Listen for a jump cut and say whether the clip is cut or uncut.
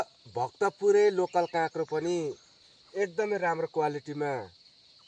uncut